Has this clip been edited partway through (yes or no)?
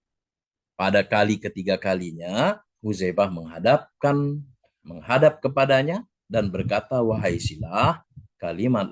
yes